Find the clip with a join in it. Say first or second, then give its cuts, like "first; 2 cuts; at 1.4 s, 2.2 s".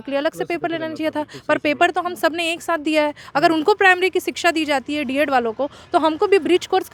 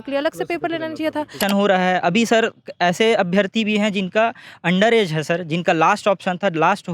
second; 1 cut; at 1.4 s